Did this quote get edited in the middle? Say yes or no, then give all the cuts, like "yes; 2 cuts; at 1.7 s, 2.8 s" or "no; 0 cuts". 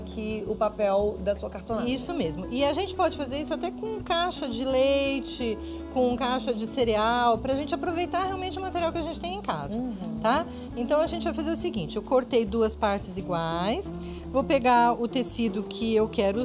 yes; 1 cut; at 14.7 s